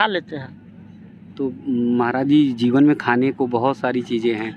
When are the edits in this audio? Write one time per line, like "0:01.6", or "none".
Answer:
none